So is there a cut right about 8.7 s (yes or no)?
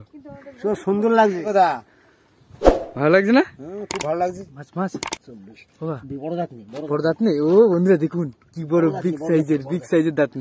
no